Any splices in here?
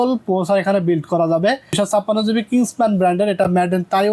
yes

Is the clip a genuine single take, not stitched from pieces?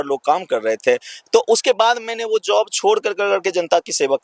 yes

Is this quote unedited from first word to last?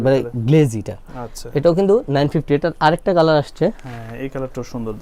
yes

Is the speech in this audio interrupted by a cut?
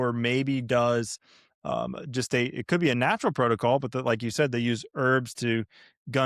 no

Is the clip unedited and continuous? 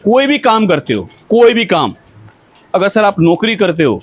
yes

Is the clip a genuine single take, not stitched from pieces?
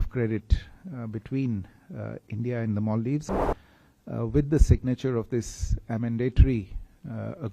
no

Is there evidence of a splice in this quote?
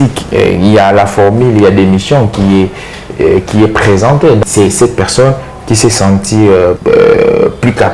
yes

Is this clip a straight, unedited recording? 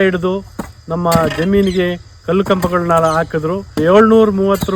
no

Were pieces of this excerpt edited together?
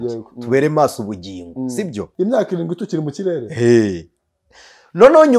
yes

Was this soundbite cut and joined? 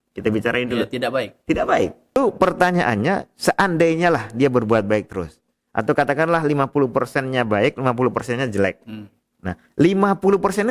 yes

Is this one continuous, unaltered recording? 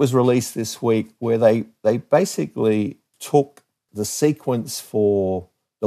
no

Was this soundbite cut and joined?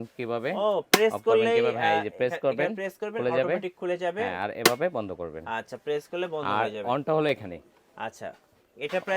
no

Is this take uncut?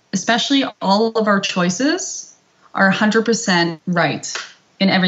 no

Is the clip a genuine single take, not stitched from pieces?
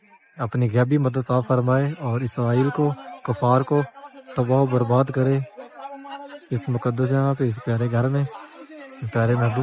no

